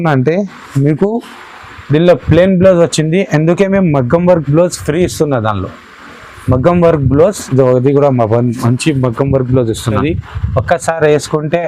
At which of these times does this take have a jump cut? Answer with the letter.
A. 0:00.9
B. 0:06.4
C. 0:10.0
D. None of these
C